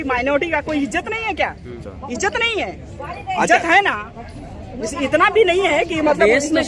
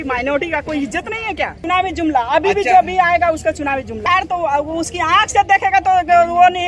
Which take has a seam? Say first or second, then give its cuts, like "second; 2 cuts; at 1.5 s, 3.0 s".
second; 2 cuts; at 1.6 s, 4.0 s